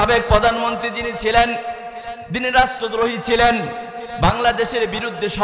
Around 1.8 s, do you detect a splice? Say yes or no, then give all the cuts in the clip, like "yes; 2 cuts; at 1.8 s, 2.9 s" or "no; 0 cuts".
no; 0 cuts